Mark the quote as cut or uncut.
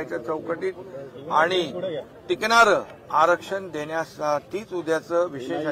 uncut